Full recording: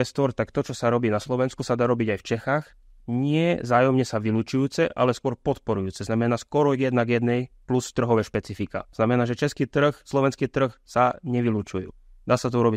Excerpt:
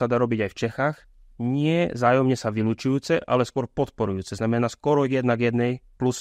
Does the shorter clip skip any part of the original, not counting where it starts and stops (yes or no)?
no